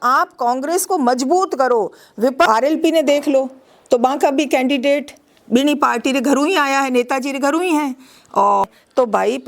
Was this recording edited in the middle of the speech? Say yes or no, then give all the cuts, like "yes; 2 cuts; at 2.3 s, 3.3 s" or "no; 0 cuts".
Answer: yes; 2 cuts; at 2.5 s, 8.6 s